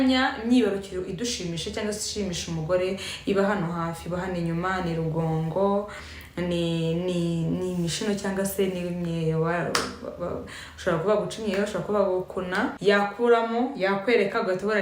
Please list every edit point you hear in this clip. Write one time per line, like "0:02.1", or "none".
0:12.8